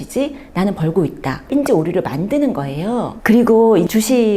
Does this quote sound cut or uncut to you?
cut